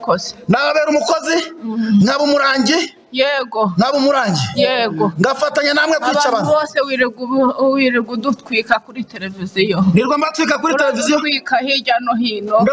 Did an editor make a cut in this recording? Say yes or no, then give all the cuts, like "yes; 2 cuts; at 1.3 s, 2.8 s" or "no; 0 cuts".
no; 0 cuts